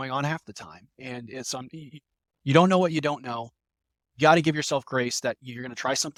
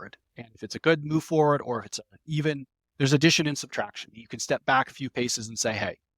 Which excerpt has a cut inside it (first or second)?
second